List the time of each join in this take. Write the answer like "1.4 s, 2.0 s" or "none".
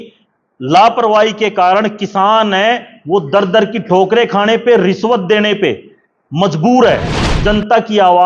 7.3 s